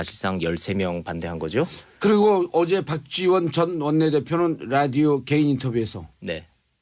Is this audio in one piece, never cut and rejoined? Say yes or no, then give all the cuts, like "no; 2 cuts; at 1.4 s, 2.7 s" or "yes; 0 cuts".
yes; 0 cuts